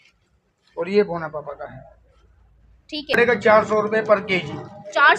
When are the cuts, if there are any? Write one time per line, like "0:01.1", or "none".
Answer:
0:03.2